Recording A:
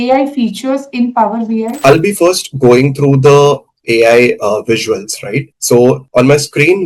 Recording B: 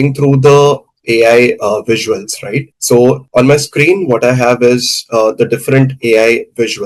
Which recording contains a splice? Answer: A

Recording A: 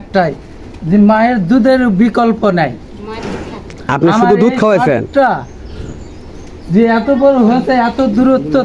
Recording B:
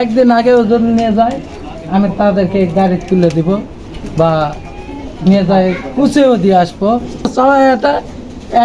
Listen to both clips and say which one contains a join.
B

